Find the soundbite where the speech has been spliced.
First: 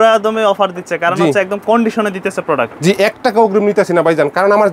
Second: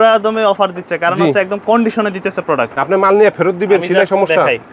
second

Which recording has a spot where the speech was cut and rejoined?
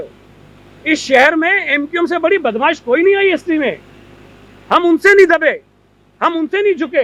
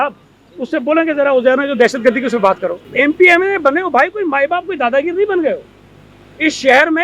second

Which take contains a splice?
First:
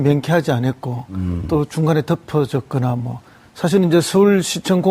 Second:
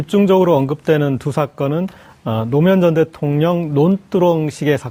first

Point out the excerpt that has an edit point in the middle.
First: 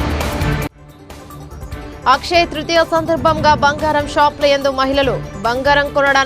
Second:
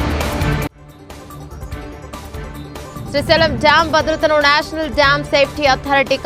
first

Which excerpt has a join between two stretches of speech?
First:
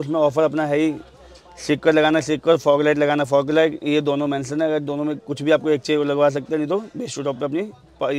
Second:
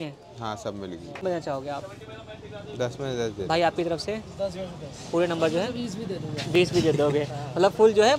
second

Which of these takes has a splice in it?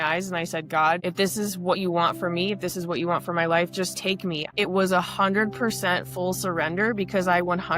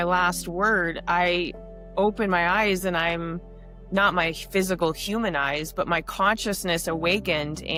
first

